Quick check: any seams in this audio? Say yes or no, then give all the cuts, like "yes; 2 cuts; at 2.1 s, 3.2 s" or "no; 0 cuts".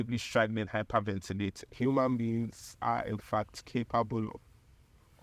yes; 1 cut; at 1.6 s